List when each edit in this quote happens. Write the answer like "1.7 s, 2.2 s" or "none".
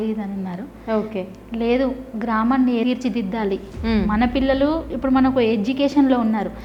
none